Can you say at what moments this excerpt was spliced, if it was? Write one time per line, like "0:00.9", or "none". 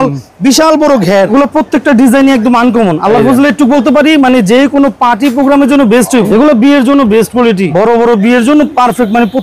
0:01.3
0:06.3
0:07.7